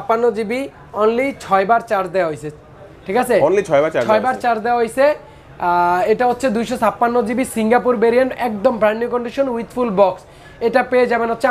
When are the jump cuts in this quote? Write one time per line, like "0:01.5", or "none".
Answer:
none